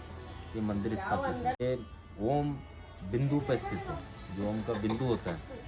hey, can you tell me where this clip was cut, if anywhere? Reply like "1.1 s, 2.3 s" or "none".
1.6 s